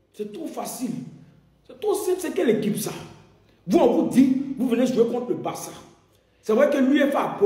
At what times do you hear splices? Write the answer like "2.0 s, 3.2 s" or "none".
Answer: none